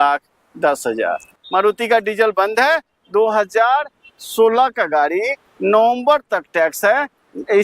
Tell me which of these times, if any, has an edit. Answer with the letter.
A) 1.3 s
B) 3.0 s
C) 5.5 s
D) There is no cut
A